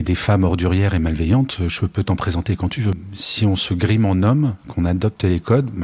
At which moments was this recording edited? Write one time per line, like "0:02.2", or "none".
0:03.0